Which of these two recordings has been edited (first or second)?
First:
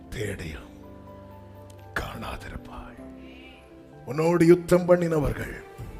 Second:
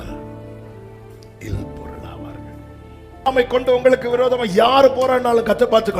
second